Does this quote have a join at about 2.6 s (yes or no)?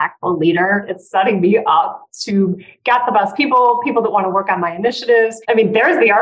no